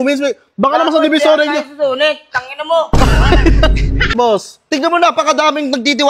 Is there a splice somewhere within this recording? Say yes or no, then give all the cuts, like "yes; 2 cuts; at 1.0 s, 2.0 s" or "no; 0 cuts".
yes; 1 cut; at 4.1 s